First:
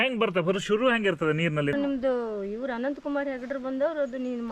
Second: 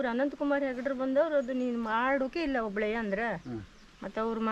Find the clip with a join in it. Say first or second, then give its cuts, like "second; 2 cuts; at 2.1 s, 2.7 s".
first; 1 cut; at 1.7 s